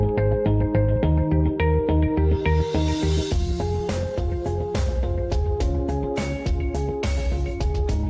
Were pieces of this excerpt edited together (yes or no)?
no